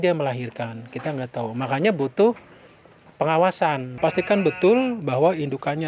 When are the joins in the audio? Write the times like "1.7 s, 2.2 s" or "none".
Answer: 3.9 s